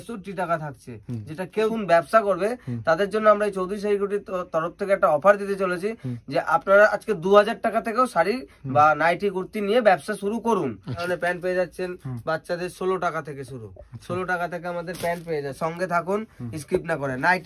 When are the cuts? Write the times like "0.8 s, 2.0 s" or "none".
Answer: 1.7 s, 11.0 s, 15.6 s